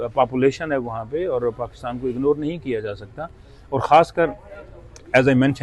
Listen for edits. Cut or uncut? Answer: uncut